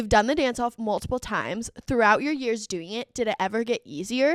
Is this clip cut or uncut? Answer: uncut